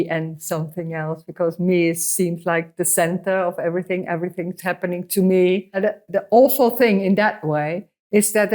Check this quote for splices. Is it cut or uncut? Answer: cut